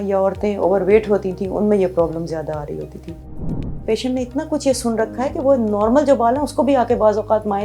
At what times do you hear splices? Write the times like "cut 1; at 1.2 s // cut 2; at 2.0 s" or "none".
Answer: cut 1; at 3.6 s